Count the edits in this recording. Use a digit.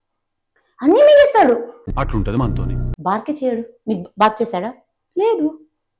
1